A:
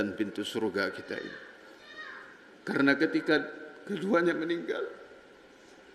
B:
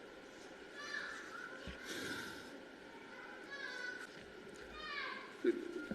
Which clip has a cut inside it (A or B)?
B